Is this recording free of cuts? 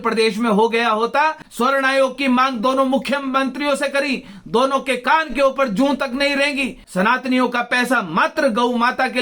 no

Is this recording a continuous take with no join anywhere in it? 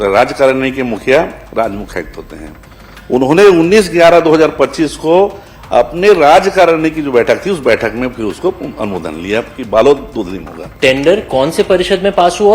no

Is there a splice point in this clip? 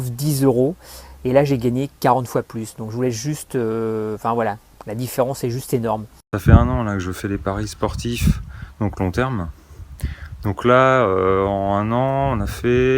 yes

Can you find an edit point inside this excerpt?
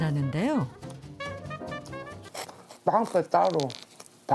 yes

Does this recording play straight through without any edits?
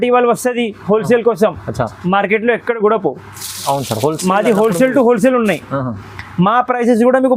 yes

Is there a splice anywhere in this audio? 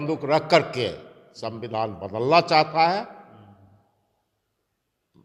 no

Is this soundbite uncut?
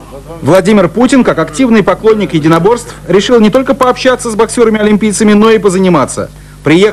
yes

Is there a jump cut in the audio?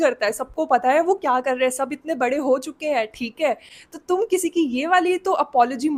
no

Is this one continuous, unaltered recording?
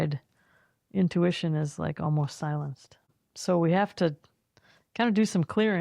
no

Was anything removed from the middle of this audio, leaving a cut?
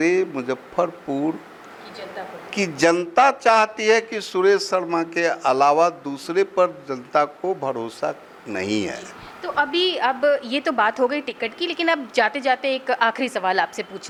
no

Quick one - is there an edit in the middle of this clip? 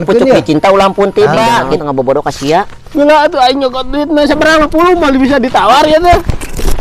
yes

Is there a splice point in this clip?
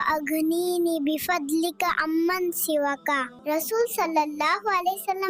yes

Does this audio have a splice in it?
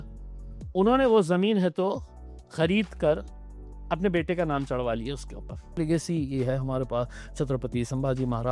yes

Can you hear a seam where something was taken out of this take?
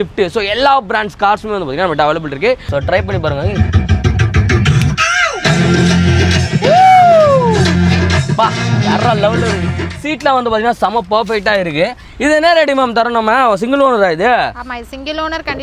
yes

